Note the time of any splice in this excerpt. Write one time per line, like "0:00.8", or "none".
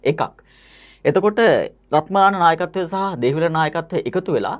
none